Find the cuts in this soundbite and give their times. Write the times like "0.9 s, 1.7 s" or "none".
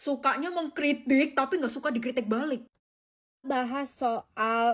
2.8 s

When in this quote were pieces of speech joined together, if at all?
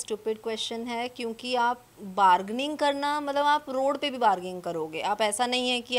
none

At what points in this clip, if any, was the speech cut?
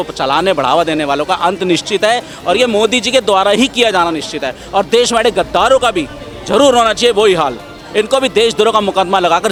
none

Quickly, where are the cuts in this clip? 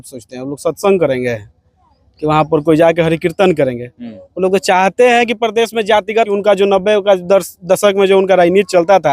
6.3 s

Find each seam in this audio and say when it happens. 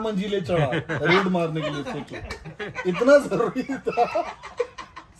none

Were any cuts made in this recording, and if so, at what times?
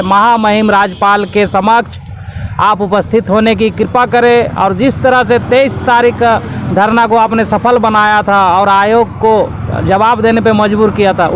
none

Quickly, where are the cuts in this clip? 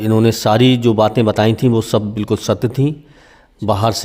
none

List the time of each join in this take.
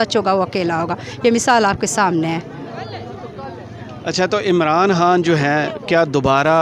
none

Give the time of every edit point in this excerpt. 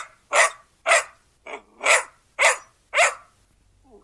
none

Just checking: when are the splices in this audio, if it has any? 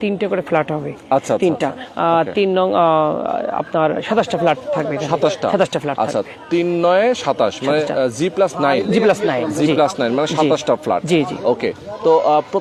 none

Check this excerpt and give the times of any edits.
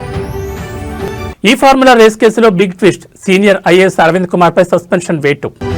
0.9 s

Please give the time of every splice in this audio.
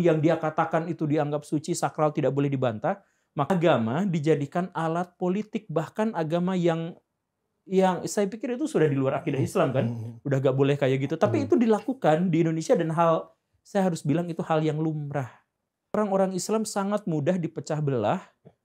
3.5 s, 15.9 s

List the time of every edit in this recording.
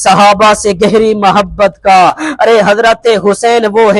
2.2 s

